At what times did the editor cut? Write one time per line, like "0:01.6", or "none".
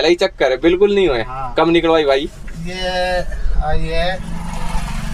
none